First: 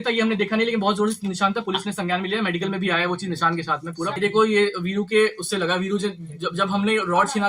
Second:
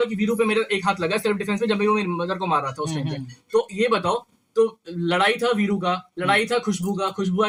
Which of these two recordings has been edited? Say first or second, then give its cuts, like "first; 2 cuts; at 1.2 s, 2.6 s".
first; 1 cut; at 4.2 s